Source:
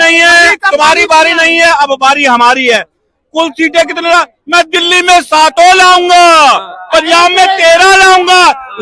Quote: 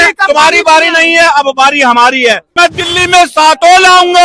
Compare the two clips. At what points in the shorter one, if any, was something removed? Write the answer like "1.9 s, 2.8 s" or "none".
2.5 s